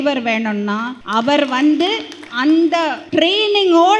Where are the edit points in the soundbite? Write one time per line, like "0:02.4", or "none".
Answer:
0:01.0
0:02.2
0:03.0

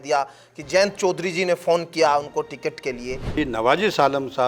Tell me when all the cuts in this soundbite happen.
0:03.4

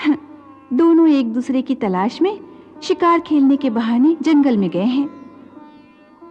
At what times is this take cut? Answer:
none

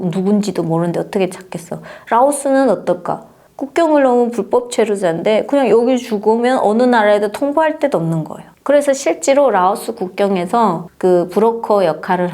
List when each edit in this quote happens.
0:10.9

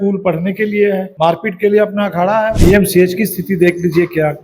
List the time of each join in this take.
0:01.1
0:02.6

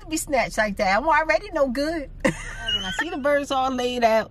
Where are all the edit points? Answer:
0:02.9

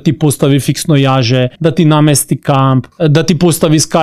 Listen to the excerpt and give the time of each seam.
0:01.5
0:02.9

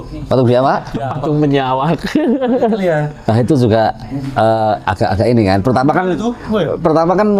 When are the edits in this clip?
none

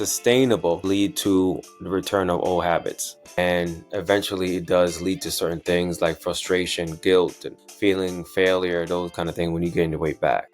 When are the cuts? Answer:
0:00.8
0:03.3

